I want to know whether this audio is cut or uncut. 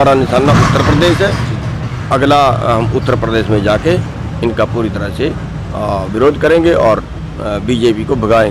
uncut